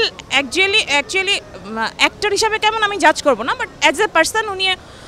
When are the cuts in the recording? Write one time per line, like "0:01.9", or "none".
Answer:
none